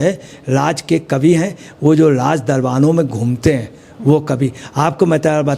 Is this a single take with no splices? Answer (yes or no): yes